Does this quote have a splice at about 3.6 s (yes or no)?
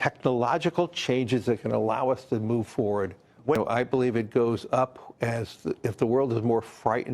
yes